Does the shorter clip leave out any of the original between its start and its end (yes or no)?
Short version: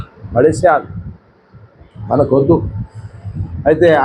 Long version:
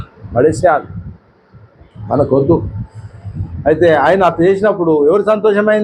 no